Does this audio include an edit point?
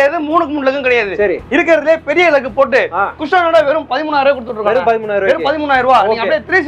no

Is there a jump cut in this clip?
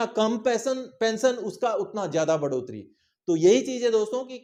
no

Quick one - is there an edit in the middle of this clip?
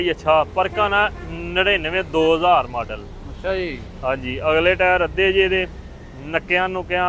no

